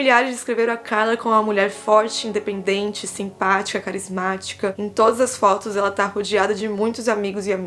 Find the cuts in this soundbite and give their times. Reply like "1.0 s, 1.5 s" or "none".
4.8 s